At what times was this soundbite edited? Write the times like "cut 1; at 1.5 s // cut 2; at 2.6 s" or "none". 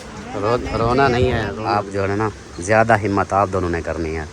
cut 1; at 1.7 s

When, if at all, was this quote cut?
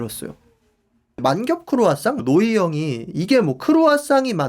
cut 1; at 1.2 s // cut 2; at 2.2 s

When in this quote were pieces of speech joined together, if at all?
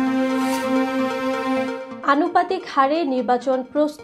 none

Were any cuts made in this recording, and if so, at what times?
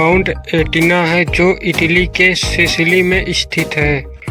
none

